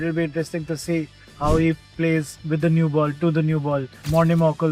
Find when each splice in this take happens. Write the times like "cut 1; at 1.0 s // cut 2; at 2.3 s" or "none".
none